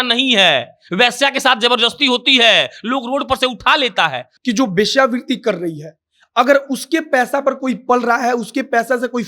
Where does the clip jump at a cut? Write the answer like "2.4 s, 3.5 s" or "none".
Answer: 4.3 s